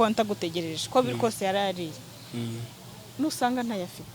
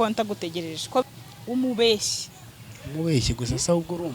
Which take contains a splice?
second; 1 cut; at 1.1 s

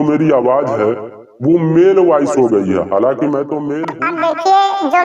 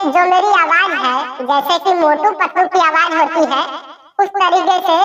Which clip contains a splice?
first; 1 cut; at 3.8 s

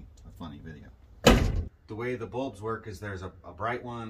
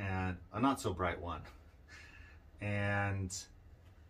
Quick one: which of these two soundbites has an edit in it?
first; 1 cut; at 1.6 s

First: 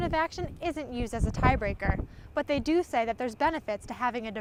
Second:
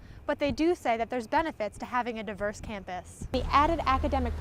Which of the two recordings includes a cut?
second; 1 cut; at 3.3 s

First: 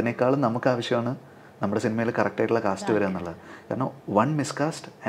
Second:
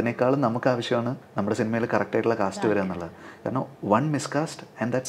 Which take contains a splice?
second; 1 cut; at 1.2 s

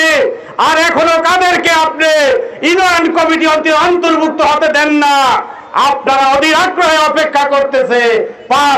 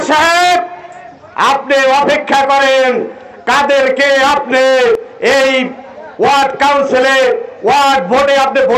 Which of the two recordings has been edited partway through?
second; 1 cut; at 5.1 s

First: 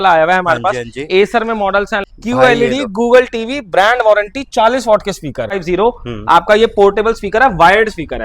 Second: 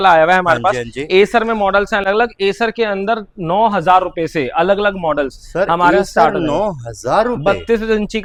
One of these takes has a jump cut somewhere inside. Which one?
first; 2 cuts; at 2.0 s, 5.6 s

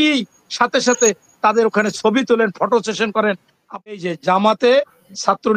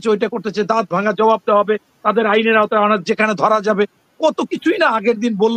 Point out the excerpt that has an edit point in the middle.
first; 1 cut; at 3.9 s

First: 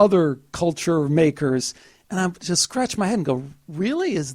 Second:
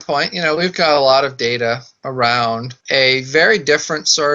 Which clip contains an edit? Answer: second; 1 cut; at 2.7 s

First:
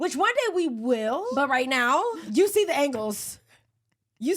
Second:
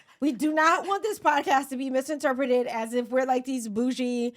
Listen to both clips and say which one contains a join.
first; 2 cuts; at 1.3 s, 2.2 s

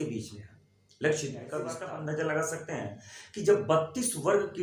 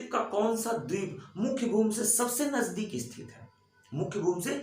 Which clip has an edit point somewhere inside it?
first; 1 cut; at 1.8 s

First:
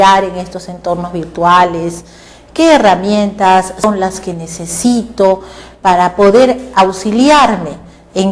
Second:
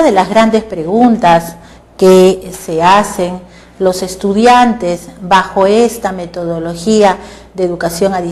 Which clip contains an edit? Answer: first; 1 cut; at 5.6 s

